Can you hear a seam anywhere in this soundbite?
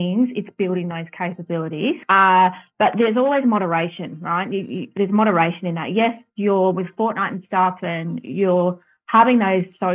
yes; 1 cut; at 2.0 s

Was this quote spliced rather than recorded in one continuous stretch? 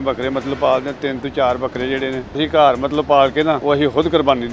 yes; 2 cuts; at 2.4 s, 3.6 s

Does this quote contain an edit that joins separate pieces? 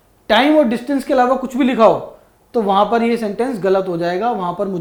no; 0 cuts

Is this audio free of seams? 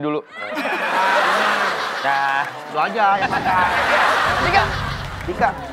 no; 1 cut; at 4.4 s

